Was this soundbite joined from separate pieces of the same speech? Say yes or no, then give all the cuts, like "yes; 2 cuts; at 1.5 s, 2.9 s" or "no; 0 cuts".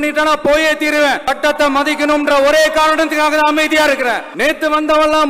yes; 2 cuts; at 1.2 s, 4.3 s